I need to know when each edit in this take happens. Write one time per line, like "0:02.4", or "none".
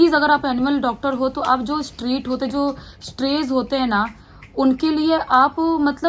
none